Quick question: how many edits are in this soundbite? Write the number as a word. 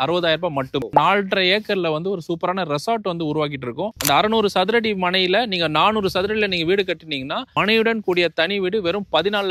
two